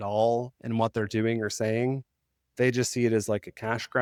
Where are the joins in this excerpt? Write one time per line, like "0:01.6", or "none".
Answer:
none